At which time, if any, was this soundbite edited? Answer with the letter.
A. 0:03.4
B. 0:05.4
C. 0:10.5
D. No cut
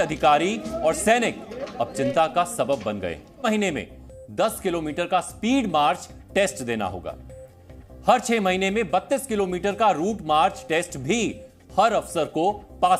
A